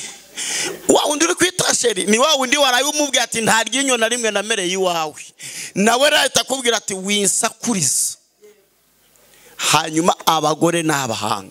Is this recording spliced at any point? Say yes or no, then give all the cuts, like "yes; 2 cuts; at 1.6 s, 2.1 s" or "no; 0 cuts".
no; 0 cuts